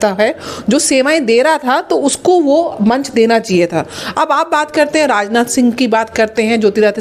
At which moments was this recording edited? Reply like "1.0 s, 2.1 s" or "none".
none